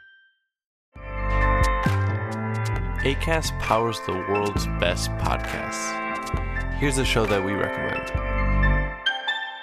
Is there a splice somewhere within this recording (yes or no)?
no